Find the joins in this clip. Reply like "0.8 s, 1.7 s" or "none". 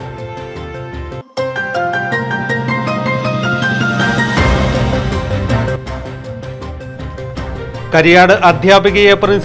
1.2 s